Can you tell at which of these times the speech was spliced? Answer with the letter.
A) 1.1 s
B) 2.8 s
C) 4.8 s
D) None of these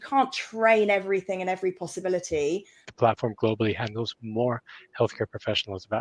B